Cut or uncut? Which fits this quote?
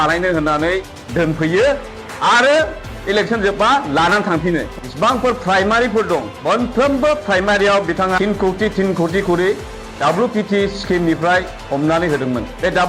cut